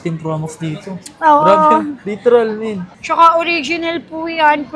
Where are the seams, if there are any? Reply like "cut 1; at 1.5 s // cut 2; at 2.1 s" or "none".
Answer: none